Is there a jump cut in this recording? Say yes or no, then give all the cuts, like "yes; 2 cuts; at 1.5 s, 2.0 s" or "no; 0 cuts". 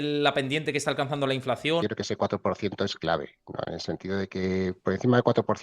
yes; 1 cut; at 1.8 s